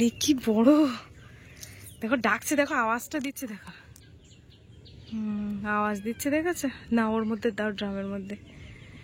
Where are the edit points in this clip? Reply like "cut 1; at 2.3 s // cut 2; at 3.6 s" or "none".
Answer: none

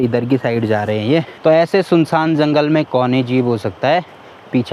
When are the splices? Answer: none

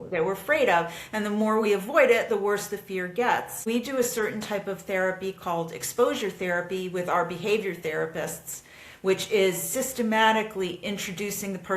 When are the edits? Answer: cut 1; at 3.6 s

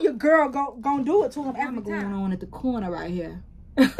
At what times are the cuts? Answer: cut 1; at 1.8 s

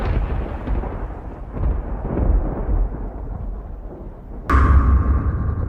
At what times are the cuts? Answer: cut 1; at 4.1 s

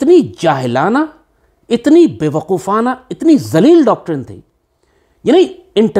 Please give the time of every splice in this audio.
none

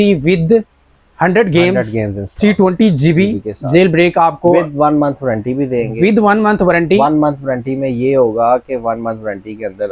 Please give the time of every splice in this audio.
none

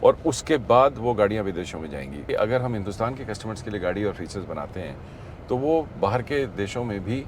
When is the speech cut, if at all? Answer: cut 1; at 2.3 s

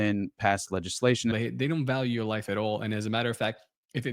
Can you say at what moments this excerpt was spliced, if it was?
cut 1; at 1.3 s

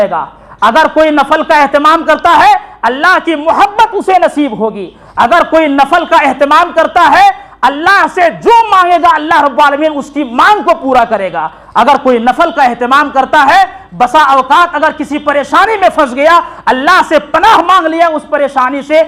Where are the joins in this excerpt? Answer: none

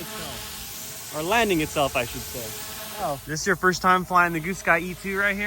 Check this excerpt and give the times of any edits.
cut 1; at 3.0 s

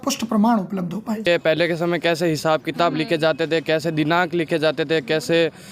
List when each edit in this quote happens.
cut 1; at 1.3 s

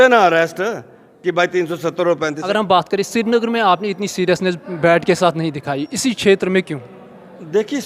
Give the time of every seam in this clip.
cut 1; at 2.4 s

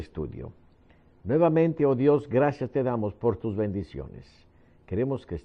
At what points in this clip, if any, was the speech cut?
cut 1; at 0.9 s

